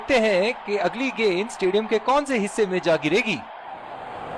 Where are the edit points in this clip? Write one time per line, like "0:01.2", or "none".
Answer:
none